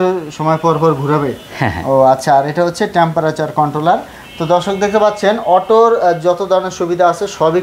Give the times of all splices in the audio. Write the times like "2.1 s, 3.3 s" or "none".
none